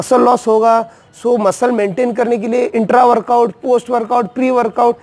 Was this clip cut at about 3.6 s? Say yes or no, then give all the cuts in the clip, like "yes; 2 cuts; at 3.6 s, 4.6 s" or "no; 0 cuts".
no; 0 cuts